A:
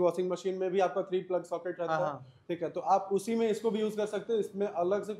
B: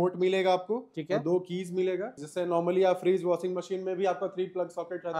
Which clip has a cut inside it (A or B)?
B